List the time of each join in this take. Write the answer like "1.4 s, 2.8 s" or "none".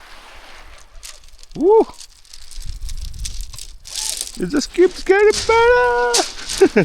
none